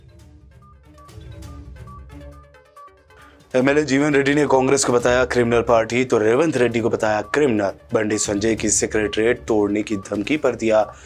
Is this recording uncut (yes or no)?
yes